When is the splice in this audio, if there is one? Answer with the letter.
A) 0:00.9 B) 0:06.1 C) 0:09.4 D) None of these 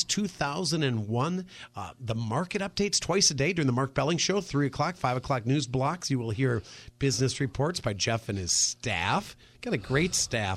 D